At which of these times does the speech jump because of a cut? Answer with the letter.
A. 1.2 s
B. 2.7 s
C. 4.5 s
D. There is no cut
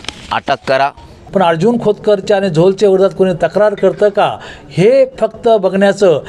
A